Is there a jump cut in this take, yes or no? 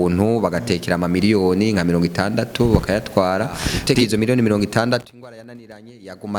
yes